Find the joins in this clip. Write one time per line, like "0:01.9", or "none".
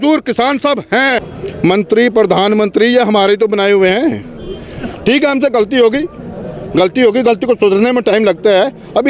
0:01.3